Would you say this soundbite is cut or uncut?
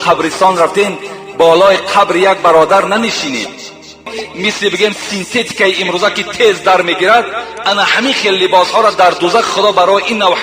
cut